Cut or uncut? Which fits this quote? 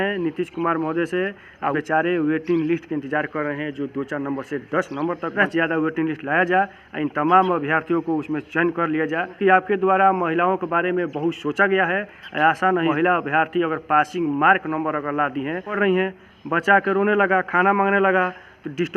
cut